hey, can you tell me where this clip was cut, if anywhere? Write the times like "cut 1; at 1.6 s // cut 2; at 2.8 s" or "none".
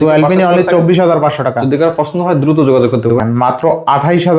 cut 1; at 3.1 s

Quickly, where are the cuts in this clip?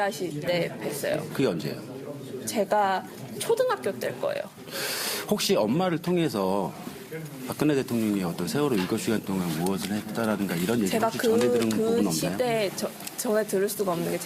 cut 1; at 2.0 s

